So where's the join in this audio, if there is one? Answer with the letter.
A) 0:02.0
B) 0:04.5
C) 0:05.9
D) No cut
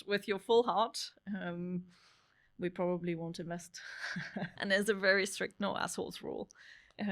B